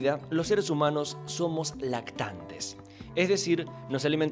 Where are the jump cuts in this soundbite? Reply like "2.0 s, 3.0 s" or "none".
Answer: 2.9 s